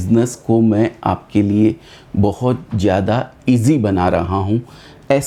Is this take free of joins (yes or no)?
yes